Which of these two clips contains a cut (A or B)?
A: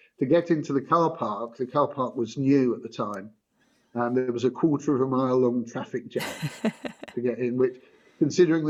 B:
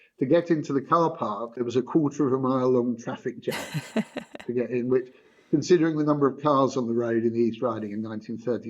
B